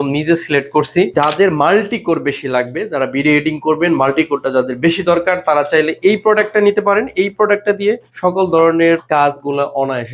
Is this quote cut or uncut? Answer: cut